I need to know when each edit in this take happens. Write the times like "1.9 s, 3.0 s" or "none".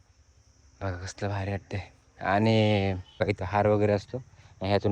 3.2 s